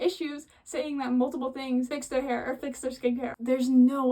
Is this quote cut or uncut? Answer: cut